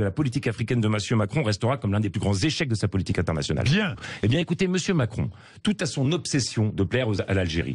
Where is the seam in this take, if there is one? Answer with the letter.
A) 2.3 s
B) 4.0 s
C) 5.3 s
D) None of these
B